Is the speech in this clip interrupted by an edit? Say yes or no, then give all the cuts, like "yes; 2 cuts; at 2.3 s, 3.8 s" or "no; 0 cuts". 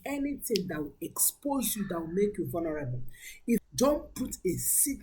yes; 1 cut; at 3.6 s